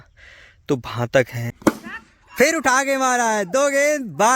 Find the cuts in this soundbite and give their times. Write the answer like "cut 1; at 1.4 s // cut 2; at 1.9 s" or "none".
cut 1; at 1.4 s